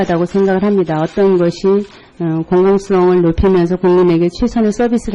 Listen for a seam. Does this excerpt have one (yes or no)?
no